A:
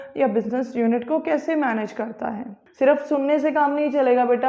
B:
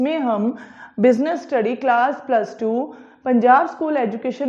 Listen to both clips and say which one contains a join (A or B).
A